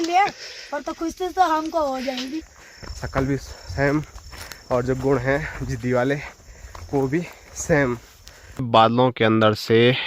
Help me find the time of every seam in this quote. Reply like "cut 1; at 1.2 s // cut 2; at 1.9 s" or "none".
cut 1; at 2.4 s // cut 2; at 8.7 s